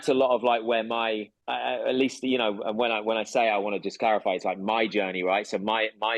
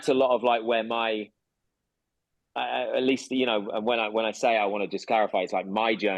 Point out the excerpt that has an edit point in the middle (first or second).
first